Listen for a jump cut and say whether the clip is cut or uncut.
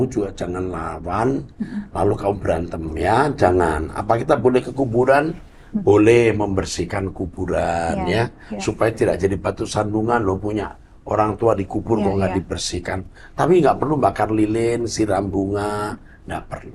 uncut